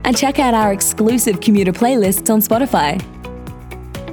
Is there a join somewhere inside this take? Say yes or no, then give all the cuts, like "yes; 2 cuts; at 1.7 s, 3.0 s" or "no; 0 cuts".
no; 0 cuts